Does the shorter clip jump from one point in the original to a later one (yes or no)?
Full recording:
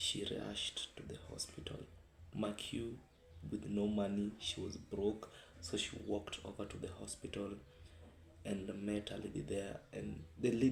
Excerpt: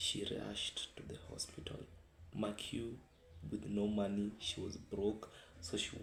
no